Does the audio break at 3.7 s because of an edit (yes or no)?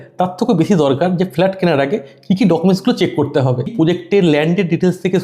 yes